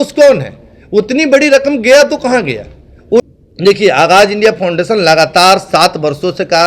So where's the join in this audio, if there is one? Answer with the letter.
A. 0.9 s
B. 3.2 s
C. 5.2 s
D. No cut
B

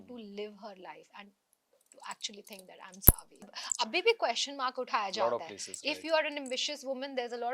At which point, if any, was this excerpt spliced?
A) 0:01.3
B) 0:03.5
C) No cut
B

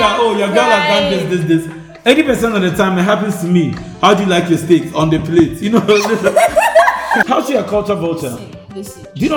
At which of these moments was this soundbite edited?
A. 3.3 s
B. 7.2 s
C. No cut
B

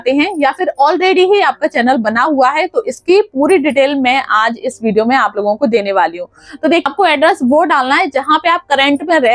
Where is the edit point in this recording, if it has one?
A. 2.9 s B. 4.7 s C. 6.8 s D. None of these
C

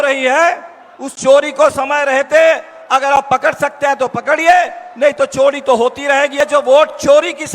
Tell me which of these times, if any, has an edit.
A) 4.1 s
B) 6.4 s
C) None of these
B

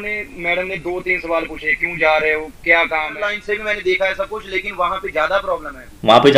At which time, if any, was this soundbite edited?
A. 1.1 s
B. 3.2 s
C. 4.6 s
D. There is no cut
B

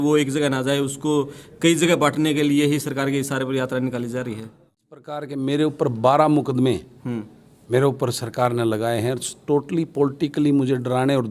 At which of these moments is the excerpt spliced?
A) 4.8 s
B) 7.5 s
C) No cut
A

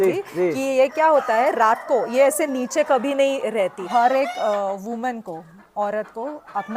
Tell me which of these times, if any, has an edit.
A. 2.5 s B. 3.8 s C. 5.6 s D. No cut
B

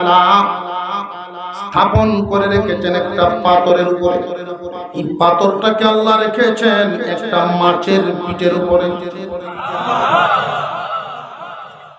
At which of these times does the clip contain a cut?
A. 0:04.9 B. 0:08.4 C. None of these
A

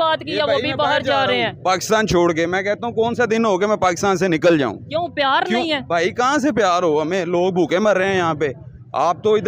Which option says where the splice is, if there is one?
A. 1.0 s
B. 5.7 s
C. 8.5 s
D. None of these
D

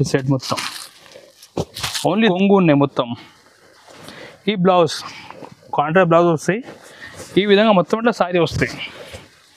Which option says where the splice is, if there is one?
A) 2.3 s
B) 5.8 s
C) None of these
A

